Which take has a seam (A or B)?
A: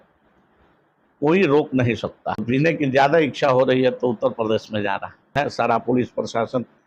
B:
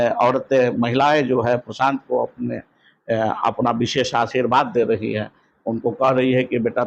A